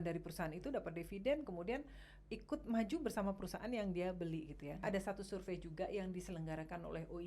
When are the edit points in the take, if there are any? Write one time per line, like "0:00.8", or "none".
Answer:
0:04.8